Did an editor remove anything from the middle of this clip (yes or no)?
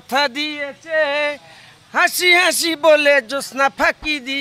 no